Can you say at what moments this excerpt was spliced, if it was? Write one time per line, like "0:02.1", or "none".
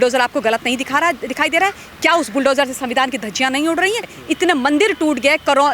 0:04.1